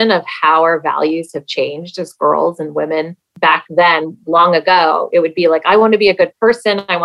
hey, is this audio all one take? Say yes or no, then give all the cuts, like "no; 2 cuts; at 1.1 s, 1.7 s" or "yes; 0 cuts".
no; 1 cut; at 3.2 s